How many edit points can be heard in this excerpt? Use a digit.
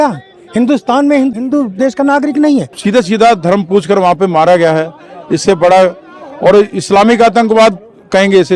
2